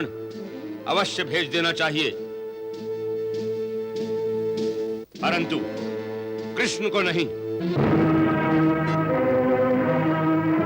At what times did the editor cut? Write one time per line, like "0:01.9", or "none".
none

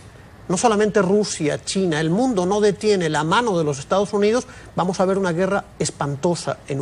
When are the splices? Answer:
none

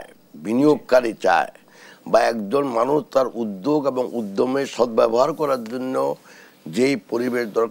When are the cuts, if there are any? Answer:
none

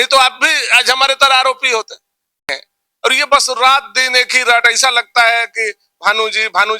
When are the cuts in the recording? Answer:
0:02.4

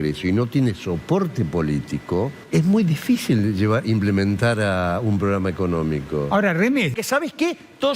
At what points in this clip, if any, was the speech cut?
0:02.4
0:06.9

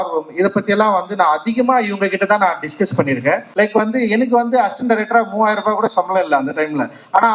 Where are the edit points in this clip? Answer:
0:03.5

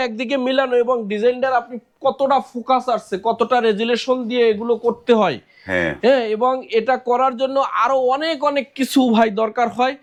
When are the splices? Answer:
none

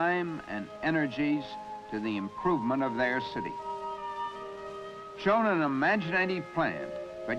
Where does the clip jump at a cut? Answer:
0:06.3

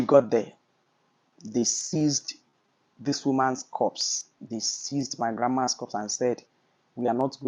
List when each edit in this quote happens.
none

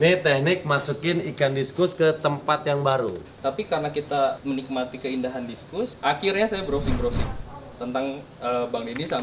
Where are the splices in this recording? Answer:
0:03.3
0:04.4
0:05.9

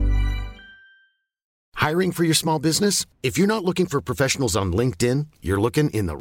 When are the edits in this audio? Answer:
0:01.5

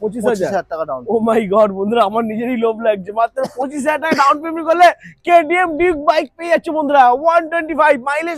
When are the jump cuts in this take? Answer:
none

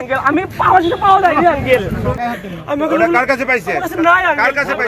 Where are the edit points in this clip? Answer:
0:02.2

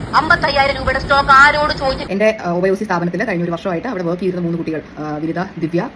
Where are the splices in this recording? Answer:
0:02.0

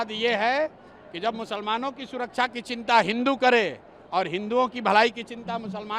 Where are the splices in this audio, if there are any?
none

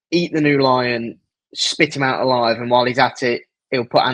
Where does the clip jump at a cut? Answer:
none

